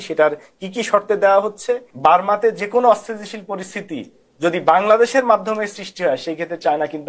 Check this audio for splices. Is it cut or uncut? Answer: cut